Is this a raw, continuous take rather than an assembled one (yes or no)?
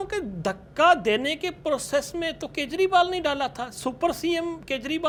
yes